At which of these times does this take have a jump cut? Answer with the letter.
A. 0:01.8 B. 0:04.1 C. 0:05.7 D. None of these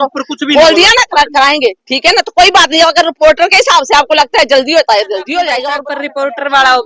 C